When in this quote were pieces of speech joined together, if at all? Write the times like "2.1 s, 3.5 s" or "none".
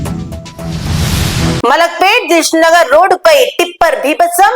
1.6 s